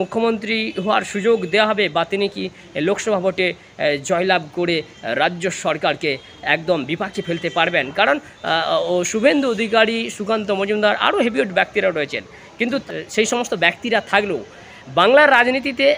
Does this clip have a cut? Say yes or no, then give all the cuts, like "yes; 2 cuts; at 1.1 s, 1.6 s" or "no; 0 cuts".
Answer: no; 0 cuts